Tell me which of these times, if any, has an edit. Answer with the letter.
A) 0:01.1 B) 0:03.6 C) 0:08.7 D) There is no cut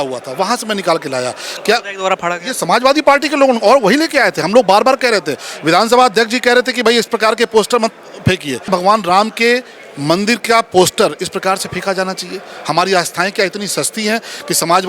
C